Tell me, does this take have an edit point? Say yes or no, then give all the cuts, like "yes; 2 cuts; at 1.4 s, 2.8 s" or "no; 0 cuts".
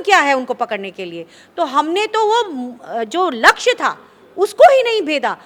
no; 0 cuts